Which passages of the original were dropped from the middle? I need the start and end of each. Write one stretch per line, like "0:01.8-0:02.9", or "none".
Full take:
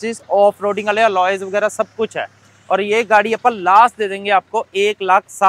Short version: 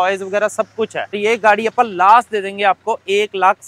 0:02.4-0:02.8